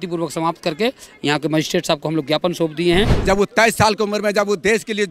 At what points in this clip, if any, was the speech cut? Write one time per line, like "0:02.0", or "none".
0:03.2